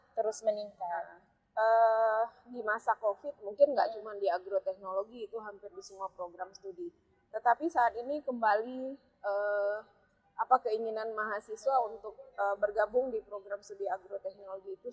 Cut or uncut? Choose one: uncut